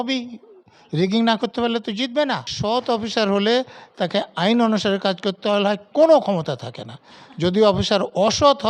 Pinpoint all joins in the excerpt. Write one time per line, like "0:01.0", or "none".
0:02.5